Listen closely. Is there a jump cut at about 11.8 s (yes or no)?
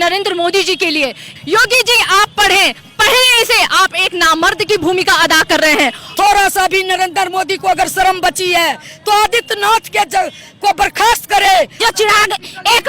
yes